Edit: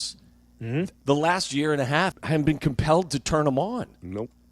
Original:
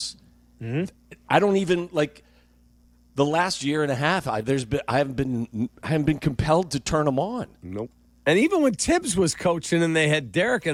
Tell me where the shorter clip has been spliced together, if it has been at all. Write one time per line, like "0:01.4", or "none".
0:01.0
0:02.2